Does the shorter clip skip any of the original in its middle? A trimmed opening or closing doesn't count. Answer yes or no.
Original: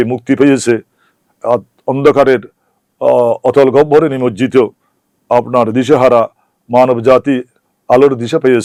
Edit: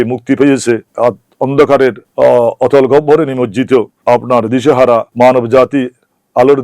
yes